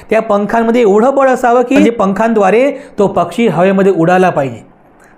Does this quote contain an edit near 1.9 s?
yes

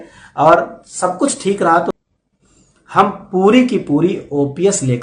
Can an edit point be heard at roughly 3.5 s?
no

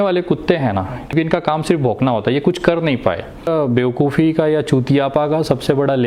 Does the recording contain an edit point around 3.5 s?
yes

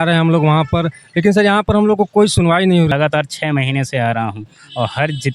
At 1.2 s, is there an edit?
no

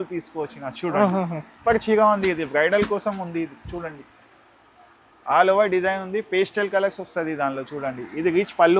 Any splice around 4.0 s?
no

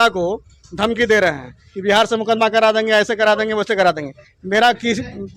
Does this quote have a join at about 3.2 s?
no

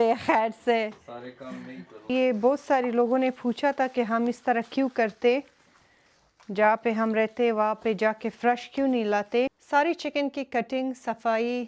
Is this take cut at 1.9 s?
yes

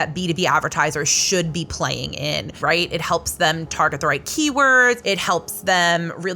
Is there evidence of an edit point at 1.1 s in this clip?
no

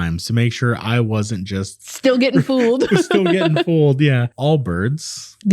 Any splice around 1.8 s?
no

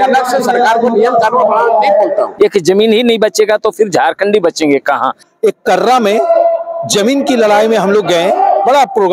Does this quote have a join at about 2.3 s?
yes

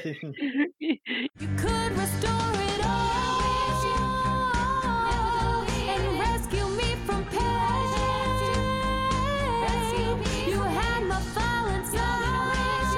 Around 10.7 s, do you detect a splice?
no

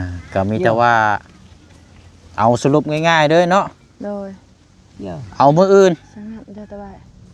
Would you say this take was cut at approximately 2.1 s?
no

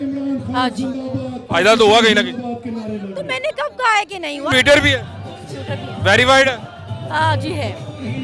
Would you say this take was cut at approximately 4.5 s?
yes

